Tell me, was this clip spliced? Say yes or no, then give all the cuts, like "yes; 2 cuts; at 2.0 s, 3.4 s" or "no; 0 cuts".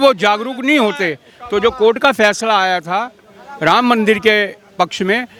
no; 0 cuts